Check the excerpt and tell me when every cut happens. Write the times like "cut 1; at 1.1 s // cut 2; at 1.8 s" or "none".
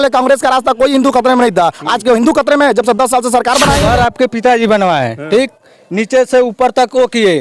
cut 1; at 3.8 s

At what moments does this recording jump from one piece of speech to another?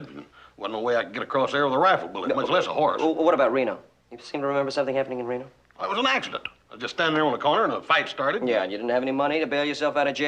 none

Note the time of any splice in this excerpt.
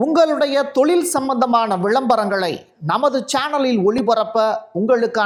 none

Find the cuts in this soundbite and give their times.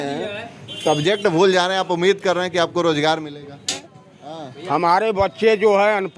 cut 1; at 3.8 s

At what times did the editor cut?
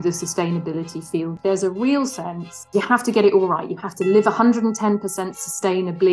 cut 1; at 1.4 s // cut 2; at 2.6 s

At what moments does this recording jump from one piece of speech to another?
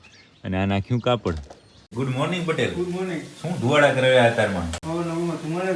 cut 1; at 1.9 s

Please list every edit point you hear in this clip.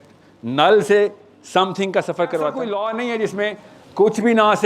cut 1; at 2.7 s

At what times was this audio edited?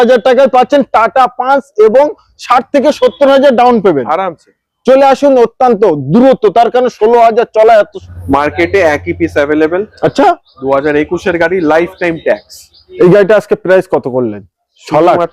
cut 1; at 8.0 s // cut 2; at 12.8 s

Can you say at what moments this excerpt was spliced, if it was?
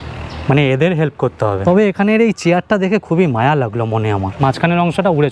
cut 1; at 1.6 s // cut 2; at 4.3 s

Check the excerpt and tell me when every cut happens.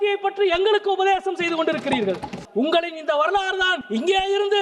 cut 1; at 2.4 s // cut 2; at 3.8 s

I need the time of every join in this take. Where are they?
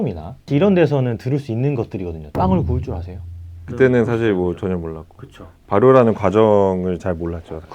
cut 1; at 2.2 s // cut 2; at 3.5 s

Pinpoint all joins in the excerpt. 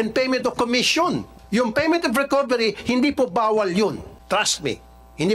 cut 1; at 1.3 s // cut 2; at 4.1 s

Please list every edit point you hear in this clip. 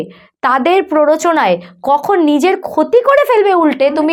none

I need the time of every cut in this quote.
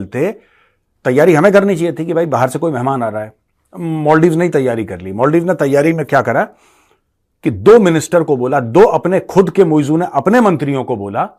none

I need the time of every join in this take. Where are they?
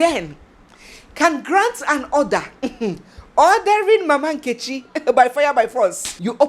none

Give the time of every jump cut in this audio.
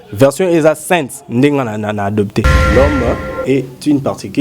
cut 1; at 2.6 s

